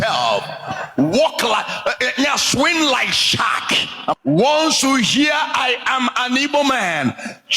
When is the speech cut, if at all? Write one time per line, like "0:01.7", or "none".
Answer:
0:04.1